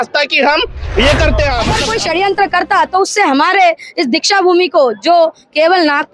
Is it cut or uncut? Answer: cut